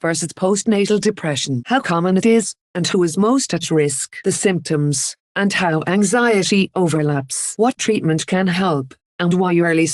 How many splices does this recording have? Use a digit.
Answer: 1